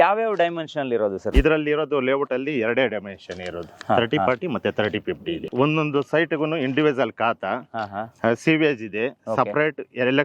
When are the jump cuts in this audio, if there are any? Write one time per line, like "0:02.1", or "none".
0:01.3
0:05.2